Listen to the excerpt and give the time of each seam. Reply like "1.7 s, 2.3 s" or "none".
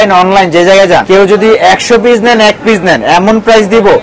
1.0 s